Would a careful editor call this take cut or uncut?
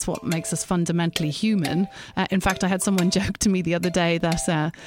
cut